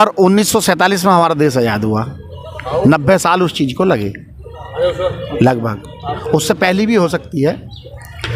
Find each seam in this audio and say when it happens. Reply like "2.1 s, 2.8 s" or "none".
none

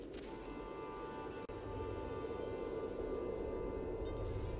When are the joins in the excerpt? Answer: none

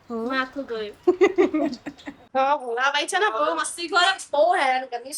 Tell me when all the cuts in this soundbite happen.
2.3 s

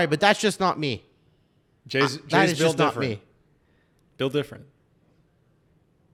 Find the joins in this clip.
none

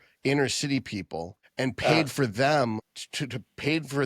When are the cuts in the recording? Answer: 1.4 s, 3.0 s

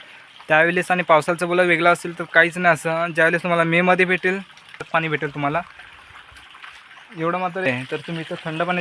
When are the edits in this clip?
4.8 s, 7.7 s

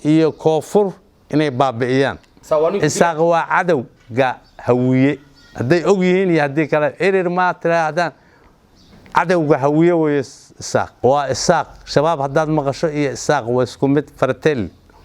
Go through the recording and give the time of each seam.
2.3 s, 10.9 s

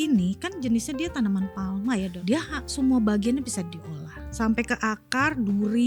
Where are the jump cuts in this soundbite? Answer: 2.1 s, 4.3 s

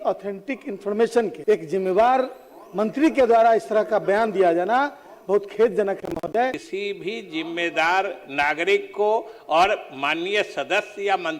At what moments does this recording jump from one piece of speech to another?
1.4 s, 6.6 s

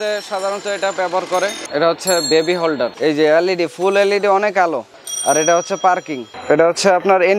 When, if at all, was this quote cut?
1.6 s, 2.9 s

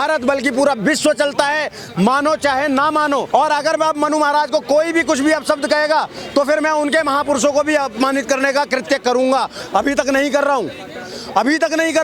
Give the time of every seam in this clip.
3.3 s

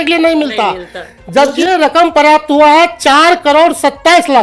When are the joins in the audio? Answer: 1.6 s

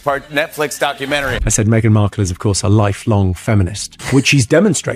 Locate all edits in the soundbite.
1.4 s

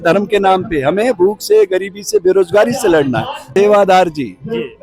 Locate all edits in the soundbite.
3.5 s

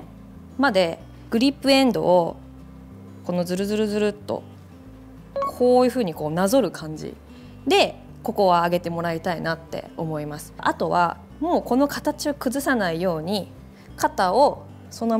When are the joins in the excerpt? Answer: 10.6 s

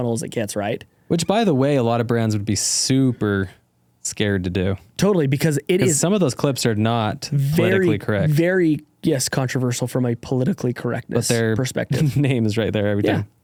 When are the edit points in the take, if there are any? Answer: none

